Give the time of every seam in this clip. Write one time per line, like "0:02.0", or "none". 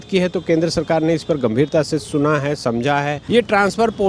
0:03.2